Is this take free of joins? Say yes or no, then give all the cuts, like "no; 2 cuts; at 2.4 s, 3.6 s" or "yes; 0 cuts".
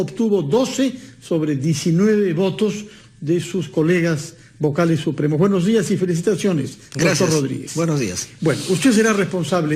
no; 1 cut; at 6.9 s